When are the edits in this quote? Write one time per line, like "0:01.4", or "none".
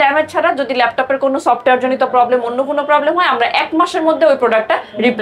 none